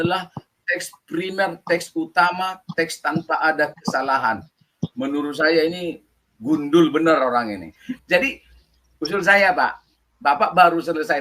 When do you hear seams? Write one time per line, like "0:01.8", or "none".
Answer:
0:08.0